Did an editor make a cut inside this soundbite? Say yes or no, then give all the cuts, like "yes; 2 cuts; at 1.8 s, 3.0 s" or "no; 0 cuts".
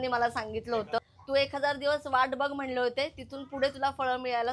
yes; 1 cut; at 1.1 s